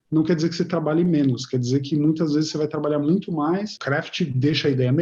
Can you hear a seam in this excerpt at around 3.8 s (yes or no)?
yes